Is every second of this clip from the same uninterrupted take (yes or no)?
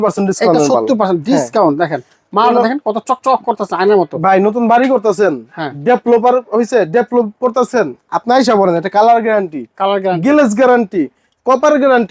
yes